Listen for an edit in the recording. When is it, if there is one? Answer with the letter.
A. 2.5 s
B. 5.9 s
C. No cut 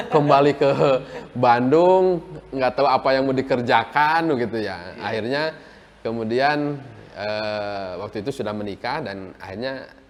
C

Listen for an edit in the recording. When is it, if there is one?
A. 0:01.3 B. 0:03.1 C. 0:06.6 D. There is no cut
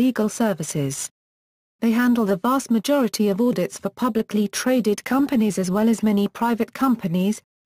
A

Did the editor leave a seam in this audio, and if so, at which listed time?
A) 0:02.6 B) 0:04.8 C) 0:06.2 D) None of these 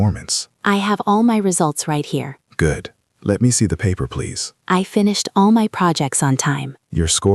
D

